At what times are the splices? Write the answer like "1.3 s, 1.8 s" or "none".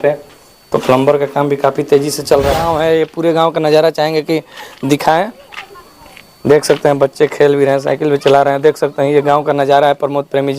2.6 s